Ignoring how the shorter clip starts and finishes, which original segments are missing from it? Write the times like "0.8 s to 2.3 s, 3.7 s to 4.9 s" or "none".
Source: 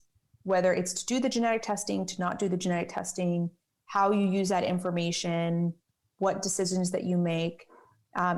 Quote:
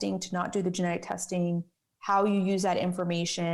none